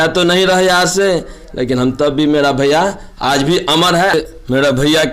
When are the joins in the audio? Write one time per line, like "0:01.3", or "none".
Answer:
0:04.1